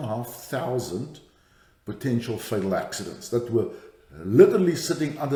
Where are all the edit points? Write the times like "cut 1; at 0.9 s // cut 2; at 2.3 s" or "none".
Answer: none